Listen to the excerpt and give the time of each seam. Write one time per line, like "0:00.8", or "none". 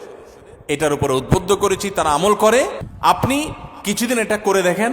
0:02.8